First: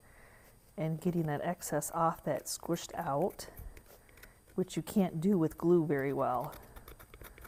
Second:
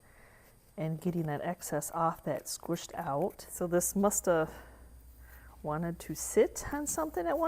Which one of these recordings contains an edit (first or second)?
second